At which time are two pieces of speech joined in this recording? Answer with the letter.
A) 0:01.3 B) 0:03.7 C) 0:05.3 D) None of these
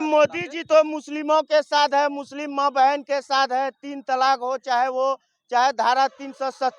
D